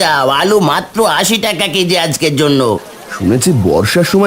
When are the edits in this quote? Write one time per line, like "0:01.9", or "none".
0:02.9